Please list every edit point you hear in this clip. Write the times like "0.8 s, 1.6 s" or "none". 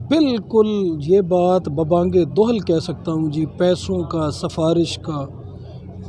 none